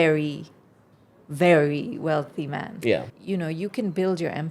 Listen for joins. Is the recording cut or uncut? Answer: cut